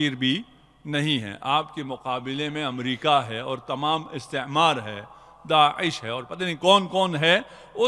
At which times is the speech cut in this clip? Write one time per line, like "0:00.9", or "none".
none